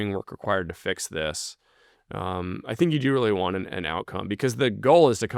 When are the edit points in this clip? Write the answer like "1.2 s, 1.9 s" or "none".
none